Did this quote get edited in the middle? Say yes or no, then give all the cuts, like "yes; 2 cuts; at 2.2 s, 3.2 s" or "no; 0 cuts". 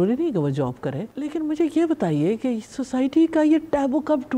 yes; 1 cut; at 1.1 s